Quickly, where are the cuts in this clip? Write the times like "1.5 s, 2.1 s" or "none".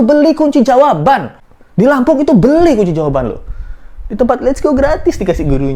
none